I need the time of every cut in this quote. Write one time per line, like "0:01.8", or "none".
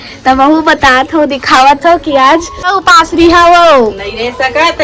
0:02.8